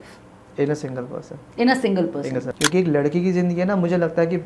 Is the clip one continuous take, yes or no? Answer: no